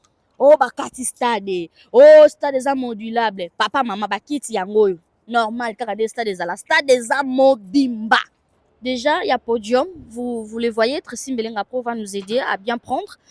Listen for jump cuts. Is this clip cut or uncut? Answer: uncut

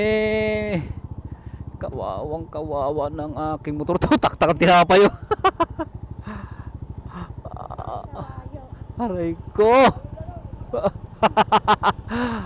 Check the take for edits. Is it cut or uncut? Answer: uncut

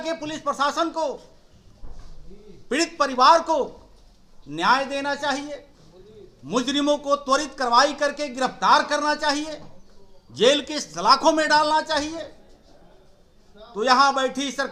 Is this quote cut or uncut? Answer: uncut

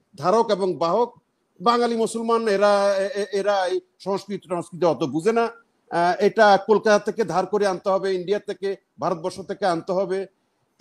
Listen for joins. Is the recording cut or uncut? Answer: uncut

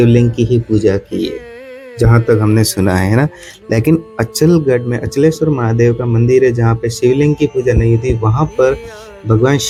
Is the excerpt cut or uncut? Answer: uncut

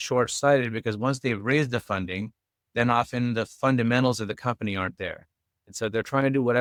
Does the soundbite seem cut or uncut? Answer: uncut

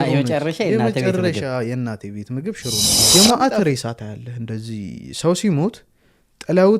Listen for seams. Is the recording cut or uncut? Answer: cut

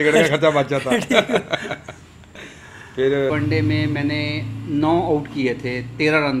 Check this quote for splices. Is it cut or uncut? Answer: cut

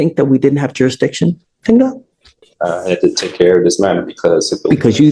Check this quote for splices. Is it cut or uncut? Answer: uncut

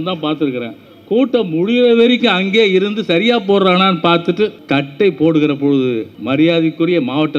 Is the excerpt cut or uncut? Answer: cut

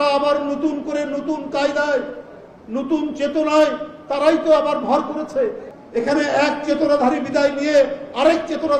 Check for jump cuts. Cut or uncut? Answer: cut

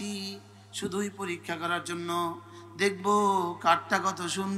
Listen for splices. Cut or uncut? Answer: uncut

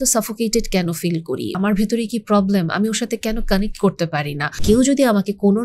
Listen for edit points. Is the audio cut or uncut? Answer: cut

